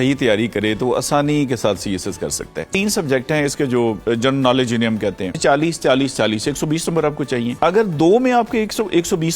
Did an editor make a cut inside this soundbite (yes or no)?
yes